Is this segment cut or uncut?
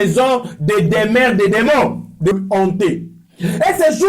cut